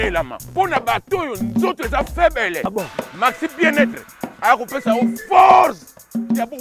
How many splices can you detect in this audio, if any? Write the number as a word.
zero